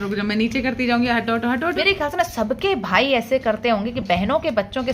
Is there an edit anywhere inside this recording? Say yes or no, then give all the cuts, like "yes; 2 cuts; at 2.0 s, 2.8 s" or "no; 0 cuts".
yes; 1 cut; at 1.8 s